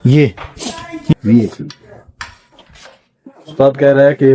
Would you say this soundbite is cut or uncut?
cut